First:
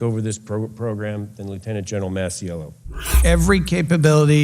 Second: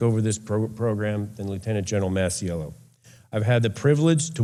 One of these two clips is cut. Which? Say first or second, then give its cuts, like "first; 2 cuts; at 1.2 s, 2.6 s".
first; 1 cut; at 3.2 s